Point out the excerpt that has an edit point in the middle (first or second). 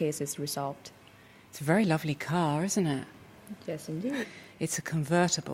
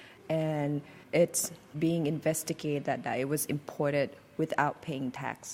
second